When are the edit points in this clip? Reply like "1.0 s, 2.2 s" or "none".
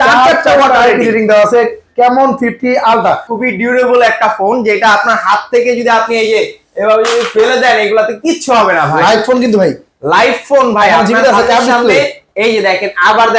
3.3 s